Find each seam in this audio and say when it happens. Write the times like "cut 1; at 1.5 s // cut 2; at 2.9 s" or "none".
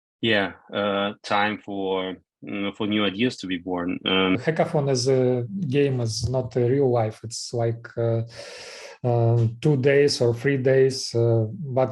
cut 1; at 4.4 s